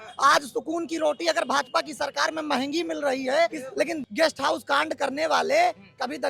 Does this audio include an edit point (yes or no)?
yes